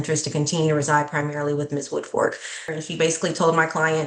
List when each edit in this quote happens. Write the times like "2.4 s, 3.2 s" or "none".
2.6 s